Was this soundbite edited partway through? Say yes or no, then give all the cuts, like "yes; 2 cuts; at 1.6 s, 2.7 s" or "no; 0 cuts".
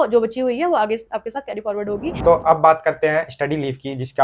yes; 1 cut; at 2.2 s